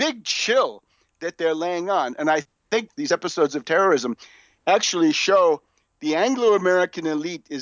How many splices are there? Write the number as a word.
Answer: one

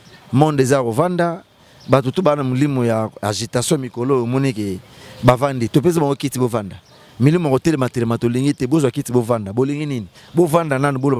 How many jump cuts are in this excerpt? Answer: zero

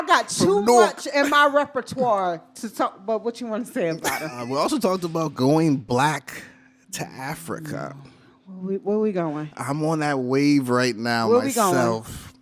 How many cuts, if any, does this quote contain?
one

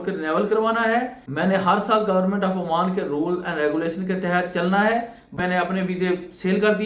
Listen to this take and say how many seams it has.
two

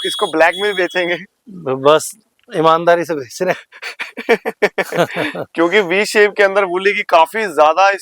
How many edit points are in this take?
zero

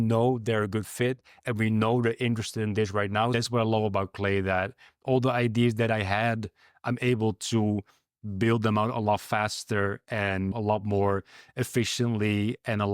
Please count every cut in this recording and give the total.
two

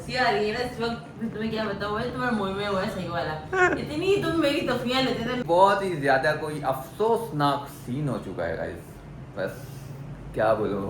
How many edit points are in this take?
one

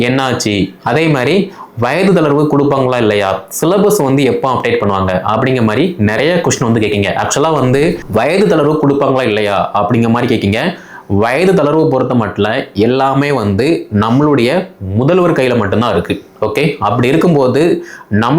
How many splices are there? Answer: one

